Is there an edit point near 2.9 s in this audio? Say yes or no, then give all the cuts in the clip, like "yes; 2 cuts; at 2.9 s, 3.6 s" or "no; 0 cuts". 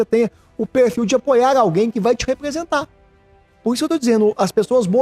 no; 0 cuts